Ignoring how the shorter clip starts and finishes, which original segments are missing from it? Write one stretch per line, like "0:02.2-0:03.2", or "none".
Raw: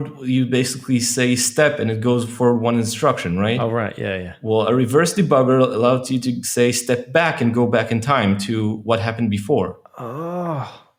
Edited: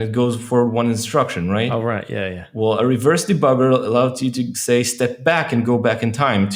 none